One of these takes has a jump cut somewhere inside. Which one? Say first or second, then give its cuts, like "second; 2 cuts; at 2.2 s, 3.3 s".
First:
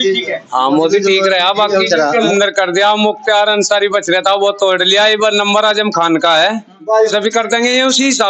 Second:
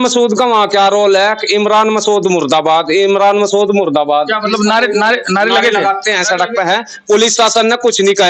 first; 2 cuts; at 2.3 s, 7.1 s